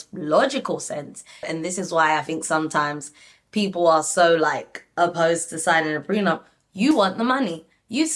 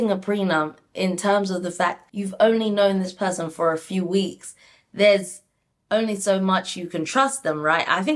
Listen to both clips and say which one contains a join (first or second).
first